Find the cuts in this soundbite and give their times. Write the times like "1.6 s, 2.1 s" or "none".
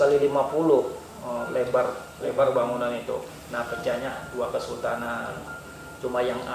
3.3 s